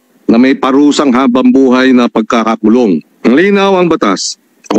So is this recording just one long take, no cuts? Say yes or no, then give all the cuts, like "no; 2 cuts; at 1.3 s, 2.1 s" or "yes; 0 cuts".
no; 1 cut; at 3.1 s